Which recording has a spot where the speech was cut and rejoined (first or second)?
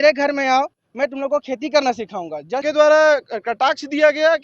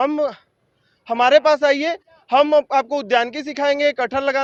first